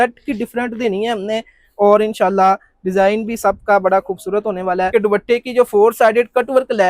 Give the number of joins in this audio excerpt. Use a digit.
1